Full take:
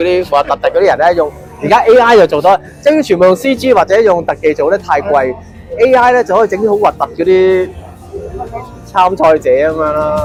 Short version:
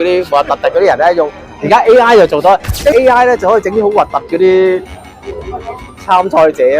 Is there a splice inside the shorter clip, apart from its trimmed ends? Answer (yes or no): yes